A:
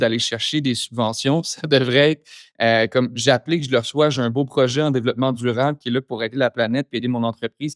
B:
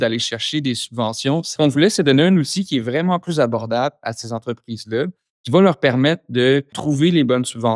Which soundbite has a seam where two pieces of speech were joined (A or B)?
B